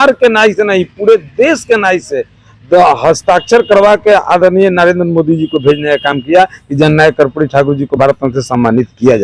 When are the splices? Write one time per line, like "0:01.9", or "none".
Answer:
none